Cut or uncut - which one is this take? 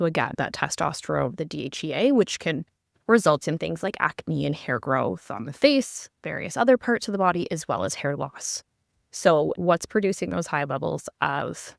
cut